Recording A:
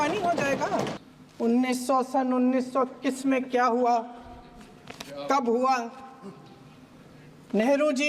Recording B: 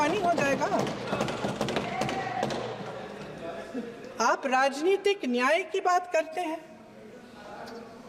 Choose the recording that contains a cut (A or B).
A